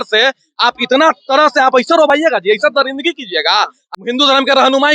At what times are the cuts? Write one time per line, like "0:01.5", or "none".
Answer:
0:03.9